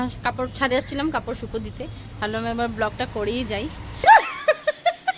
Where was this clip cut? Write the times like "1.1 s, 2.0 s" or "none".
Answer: 4.0 s